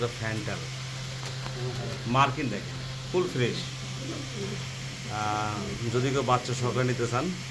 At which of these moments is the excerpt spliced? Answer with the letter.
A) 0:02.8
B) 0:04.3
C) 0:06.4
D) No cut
D